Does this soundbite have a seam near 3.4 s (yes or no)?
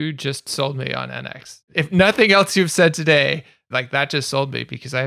no